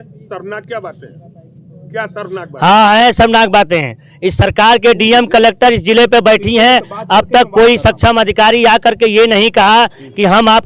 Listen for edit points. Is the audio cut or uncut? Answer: uncut